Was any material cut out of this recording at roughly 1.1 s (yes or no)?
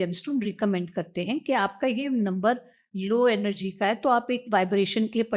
no